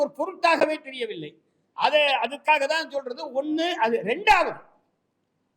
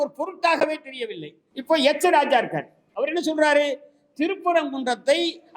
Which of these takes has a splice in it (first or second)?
second